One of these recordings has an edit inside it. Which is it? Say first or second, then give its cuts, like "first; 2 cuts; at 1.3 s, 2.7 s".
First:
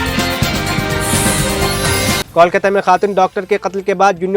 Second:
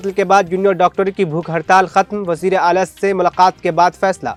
first; 1 cut; at 2.2 s